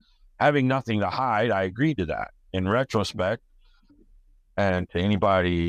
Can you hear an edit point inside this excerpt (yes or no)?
yes